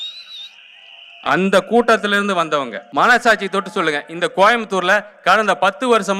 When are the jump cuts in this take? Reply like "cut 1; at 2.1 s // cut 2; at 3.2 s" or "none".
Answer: cut 1; at 2.8 s